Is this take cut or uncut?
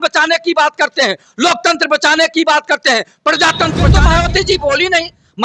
cut